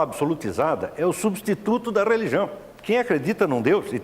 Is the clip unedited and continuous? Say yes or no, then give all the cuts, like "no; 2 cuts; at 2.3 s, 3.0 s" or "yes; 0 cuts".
no; 1 cut; at 2.7 s